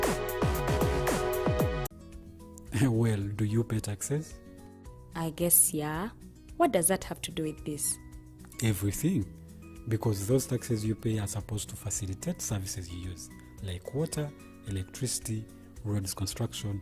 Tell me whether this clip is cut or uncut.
cut